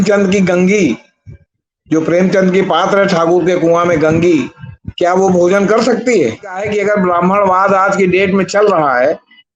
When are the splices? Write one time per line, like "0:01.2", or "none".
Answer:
0:06.6